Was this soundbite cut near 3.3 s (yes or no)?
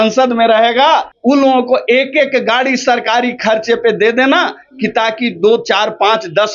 no